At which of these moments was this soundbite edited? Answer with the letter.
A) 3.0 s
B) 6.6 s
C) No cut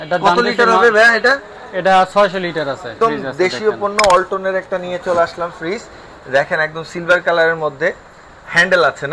A